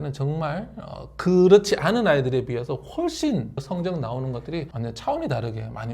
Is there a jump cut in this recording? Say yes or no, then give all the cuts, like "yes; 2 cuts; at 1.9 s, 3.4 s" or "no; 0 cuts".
yes; 1 cut; at 3.6 s